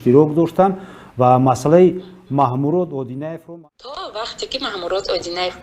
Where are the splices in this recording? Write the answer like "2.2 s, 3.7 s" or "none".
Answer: 3.3 s